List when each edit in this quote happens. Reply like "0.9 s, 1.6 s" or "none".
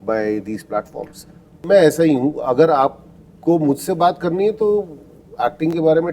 1.6 s